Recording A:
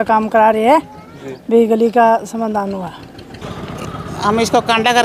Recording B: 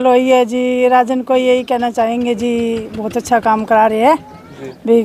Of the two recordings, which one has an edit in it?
A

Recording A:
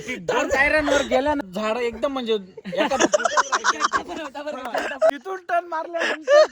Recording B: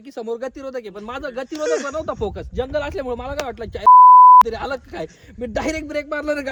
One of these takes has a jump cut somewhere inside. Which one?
A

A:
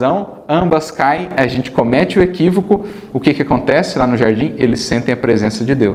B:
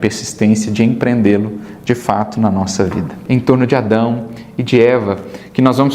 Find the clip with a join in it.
B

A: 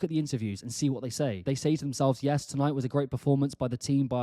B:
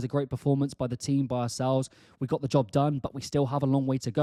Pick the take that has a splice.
A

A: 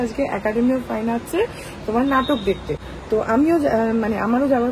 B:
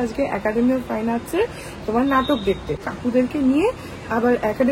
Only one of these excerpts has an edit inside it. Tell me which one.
B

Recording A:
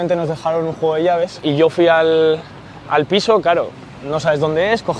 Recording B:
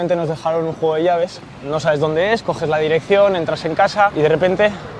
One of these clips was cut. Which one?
B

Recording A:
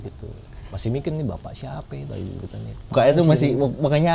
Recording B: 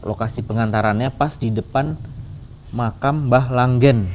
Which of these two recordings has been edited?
A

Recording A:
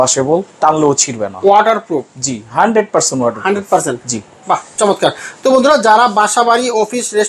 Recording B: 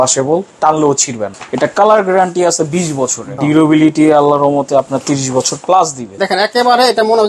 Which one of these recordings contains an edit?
B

